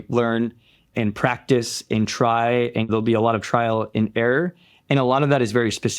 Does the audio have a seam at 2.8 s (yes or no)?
yes